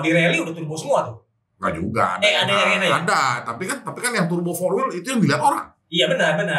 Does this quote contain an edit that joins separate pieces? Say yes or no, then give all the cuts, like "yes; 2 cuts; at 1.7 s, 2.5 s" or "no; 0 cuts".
no; 0 cuts